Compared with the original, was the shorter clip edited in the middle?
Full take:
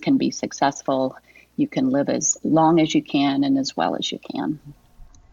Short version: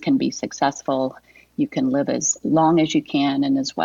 no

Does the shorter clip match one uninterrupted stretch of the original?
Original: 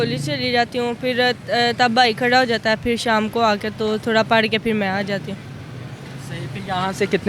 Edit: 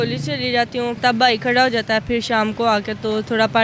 no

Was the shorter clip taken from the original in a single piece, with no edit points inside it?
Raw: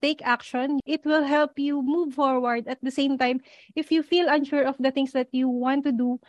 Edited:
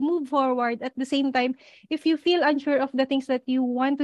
yes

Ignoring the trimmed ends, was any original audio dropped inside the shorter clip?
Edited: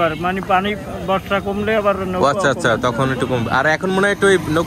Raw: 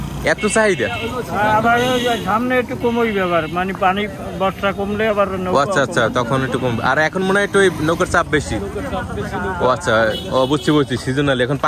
no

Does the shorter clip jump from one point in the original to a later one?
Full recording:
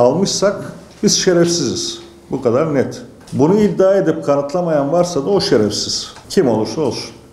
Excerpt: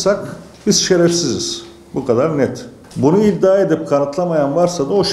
no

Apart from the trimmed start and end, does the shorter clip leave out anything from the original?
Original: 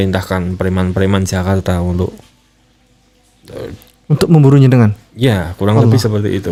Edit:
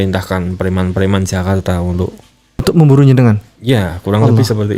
yes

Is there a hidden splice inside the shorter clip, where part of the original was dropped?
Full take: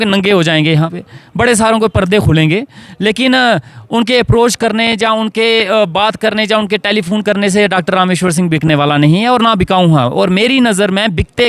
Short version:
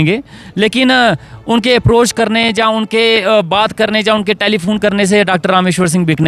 no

